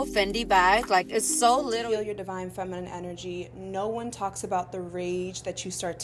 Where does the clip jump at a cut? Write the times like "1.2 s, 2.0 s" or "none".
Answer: 1.8 s